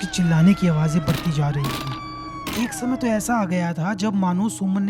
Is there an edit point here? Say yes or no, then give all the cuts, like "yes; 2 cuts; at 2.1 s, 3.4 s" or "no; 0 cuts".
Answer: yes; 1 cut; at 1.9 s